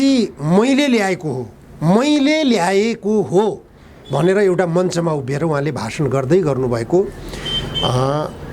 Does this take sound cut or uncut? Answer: uncut